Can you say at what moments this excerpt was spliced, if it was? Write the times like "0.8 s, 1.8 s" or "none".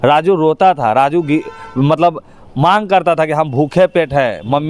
none